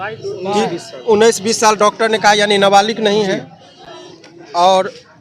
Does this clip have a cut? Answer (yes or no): no